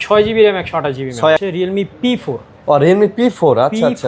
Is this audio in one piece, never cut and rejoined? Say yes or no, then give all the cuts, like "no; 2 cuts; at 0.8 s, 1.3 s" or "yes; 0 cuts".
no; 1 cut; at 1.4 s